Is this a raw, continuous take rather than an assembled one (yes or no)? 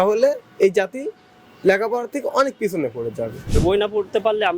no